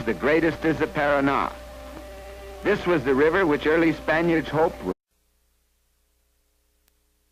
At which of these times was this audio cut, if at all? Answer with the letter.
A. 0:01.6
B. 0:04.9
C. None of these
C